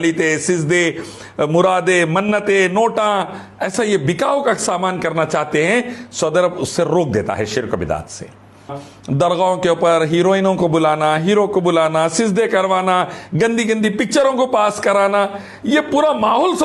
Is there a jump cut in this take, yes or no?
yes